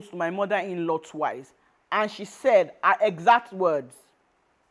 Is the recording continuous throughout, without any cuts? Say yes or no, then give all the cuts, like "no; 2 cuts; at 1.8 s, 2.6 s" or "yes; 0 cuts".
yes; 0 cuts